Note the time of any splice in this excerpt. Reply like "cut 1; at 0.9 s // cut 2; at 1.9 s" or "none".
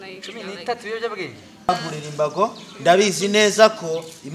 cut 1; at 1.7 s